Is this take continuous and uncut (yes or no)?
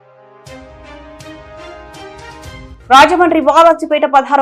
yes